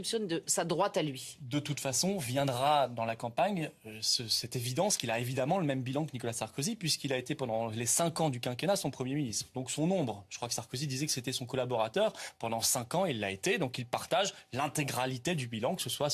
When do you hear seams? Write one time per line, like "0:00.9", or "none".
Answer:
0:13.4